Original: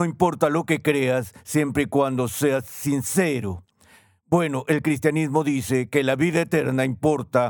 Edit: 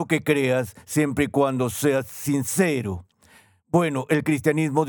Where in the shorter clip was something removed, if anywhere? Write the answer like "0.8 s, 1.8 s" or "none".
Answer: none